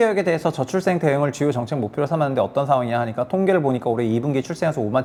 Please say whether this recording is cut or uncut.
uncut